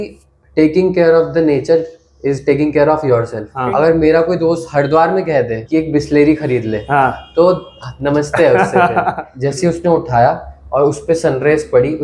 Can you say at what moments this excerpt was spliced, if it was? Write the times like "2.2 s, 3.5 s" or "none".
3.4 s, 9.2 s